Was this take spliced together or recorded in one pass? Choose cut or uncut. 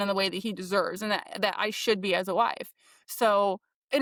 uncut